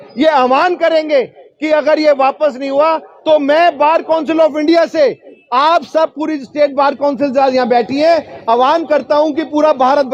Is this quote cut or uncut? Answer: uncut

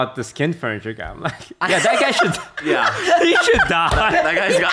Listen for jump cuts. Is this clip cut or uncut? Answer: uncut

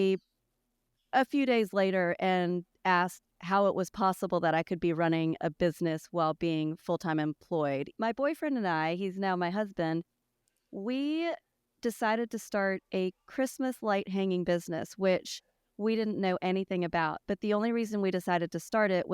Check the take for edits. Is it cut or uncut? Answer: cut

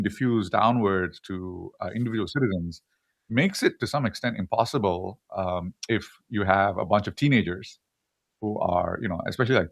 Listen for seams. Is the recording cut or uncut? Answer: uncut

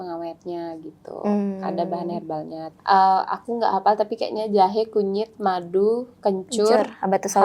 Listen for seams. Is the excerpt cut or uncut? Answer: cut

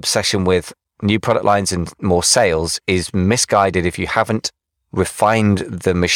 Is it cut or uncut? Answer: uncut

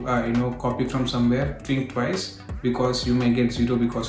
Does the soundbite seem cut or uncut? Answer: uncut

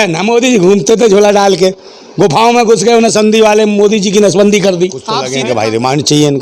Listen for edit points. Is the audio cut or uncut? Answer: cut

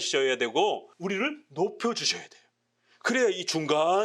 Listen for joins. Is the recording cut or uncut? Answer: cut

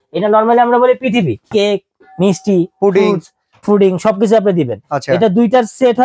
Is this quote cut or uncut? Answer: cut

